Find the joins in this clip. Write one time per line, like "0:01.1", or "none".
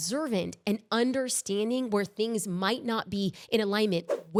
none